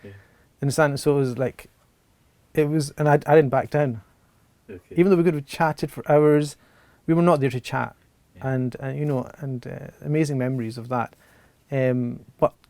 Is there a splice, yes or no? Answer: no